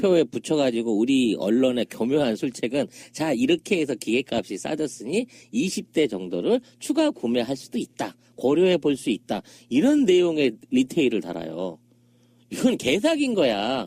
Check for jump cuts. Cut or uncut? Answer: uncut